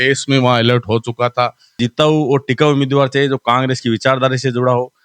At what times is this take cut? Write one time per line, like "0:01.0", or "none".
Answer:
0:01.8